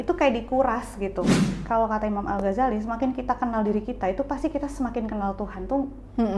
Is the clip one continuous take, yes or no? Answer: no